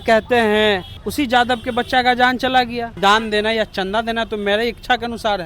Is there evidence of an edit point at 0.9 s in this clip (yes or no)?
yes